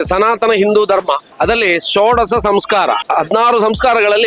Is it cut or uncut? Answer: cut